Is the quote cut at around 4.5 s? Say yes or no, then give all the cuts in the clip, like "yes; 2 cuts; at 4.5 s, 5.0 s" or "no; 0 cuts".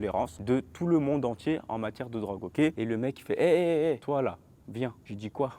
no; 1 cut; at 2.8 s